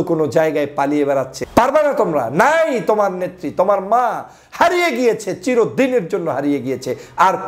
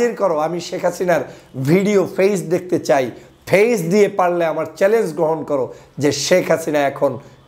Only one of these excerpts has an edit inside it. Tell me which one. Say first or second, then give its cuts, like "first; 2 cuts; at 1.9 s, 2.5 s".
first; 1 cut; at 1.4 s